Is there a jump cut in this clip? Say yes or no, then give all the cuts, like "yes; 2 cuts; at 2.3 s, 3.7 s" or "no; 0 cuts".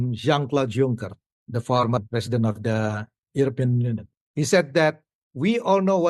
yes; 1 cut; at 2.0 s